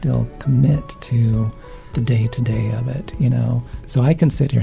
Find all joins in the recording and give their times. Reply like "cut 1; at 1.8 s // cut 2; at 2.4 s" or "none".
cut 1; at 1.8 s // cut 2; at 3.7 s